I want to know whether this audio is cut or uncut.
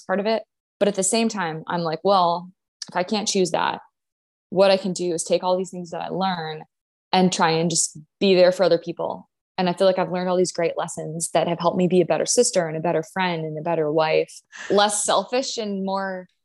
cut